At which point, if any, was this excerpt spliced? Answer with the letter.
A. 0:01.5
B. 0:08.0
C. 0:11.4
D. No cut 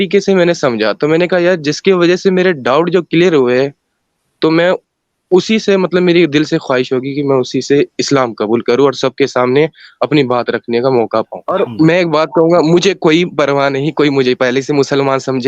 C